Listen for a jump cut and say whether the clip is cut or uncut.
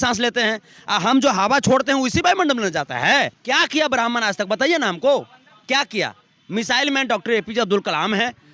cut